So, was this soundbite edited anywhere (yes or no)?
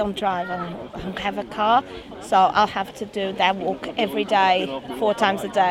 no